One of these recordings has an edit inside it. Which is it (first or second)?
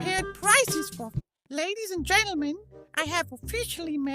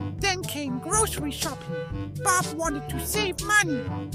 first